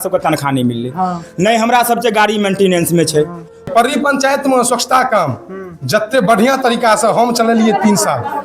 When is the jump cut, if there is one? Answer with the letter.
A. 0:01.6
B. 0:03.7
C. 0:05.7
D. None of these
B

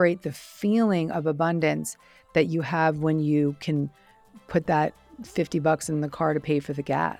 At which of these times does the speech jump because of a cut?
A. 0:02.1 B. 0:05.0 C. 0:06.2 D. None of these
D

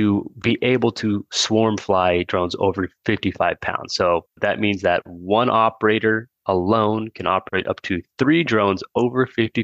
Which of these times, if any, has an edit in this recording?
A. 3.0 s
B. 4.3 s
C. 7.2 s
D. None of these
B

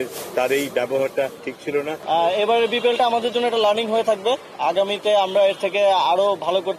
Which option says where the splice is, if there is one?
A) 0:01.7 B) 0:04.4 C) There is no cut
A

